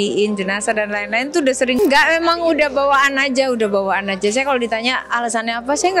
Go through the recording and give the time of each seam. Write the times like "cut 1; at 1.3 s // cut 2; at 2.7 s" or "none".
cut 1; at 1.8 s

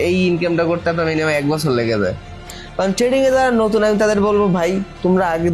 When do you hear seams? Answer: cut 1; at 2.6 s

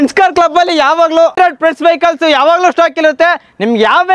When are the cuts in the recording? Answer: cut 1; at 1.3 s

